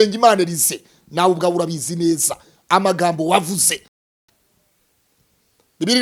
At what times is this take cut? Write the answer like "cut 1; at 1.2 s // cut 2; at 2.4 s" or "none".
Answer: none